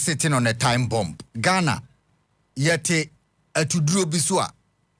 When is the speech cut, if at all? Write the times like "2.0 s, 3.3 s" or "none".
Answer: 1.2 s